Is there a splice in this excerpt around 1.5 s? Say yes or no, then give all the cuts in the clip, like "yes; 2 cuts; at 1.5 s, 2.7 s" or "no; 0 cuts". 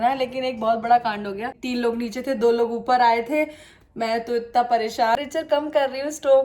yes; 2 cuts; at 1.5 s, 5.2 s